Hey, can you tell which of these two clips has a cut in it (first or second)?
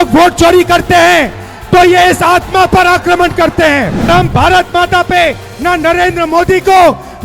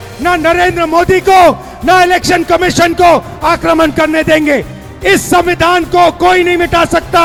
first